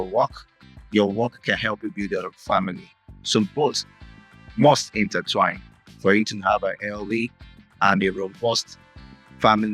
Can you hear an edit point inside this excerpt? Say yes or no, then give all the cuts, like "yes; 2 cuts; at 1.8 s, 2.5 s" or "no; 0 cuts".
no; 0 cuts